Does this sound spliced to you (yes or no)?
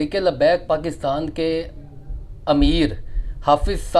no